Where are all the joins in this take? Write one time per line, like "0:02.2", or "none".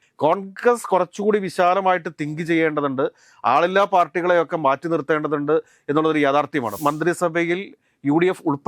0:06.8